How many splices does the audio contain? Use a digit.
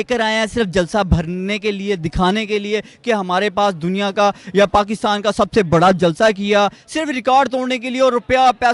0